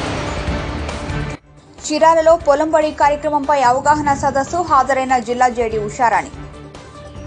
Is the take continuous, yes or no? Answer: no